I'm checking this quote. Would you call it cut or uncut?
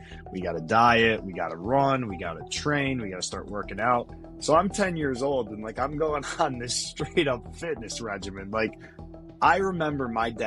uncut